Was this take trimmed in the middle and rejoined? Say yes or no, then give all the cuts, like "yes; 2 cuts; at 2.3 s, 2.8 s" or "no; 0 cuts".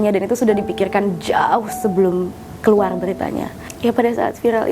yes; 1 cut; at 3.6 s